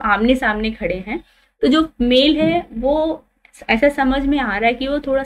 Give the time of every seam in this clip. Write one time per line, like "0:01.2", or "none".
none